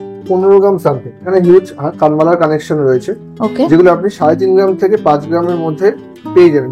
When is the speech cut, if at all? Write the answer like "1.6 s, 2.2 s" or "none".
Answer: 1.3 s